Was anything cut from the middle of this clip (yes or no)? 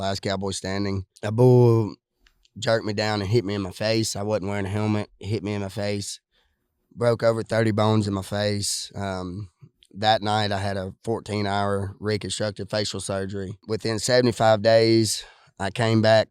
yes